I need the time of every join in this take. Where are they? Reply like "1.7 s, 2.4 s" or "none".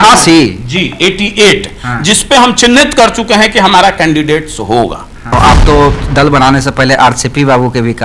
5.3 s